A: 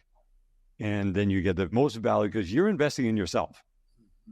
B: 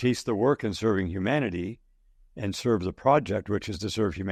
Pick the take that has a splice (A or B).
A